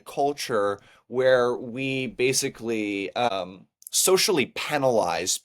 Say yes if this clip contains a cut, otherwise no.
yes